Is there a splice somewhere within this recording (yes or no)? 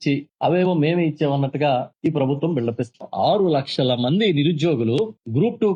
no